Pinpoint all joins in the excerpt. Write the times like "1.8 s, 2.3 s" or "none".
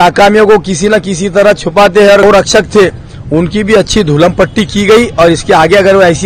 2.2 s